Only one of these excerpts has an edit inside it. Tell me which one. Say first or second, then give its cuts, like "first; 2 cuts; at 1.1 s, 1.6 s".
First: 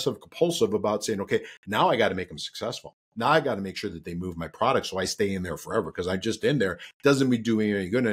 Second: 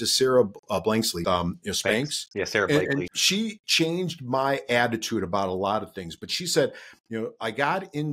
second; 2 cuts; at 1.2 s, 3.2 s